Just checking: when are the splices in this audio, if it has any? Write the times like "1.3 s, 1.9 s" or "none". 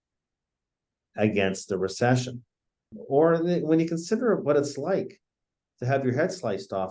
3.0 s